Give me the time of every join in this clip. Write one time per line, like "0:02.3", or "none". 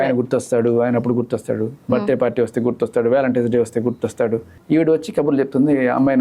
0:04.5